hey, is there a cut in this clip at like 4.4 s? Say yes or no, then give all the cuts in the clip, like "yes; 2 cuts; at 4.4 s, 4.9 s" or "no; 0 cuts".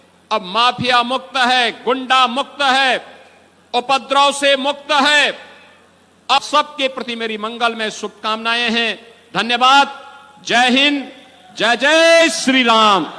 no; 1 cut; at 6.4 s